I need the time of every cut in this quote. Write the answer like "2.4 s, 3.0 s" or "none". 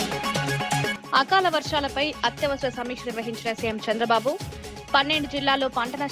0.9 s